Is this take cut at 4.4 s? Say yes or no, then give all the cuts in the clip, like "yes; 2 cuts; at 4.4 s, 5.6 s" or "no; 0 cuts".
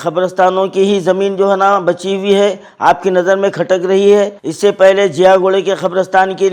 yes; 1 cut; at 4.4 s